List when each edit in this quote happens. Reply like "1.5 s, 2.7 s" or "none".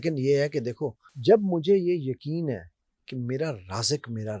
1.1 s